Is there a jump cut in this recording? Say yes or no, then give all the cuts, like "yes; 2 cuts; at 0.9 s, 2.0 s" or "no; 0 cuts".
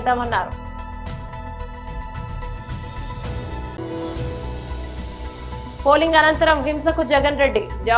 yes; 3 cuts; at 1.2 s, 3.4 s, 5.7 s